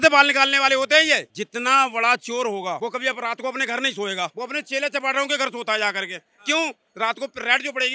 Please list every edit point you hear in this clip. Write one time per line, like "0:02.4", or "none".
0:01.3
0:02.8
0:04.3